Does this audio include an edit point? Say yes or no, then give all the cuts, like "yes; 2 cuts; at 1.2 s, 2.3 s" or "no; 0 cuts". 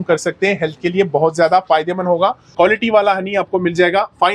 yes; 1 cut; at 2.4 s